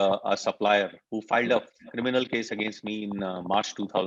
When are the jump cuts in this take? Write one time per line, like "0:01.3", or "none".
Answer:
none